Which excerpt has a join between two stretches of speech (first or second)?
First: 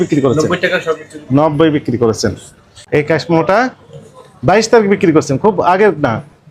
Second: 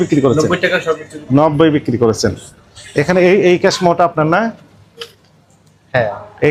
first